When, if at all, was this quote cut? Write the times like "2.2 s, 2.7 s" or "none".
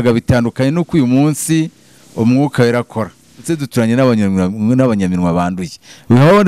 3.6 s